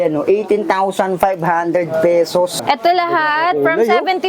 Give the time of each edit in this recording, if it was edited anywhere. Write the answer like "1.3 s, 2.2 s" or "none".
2.6 s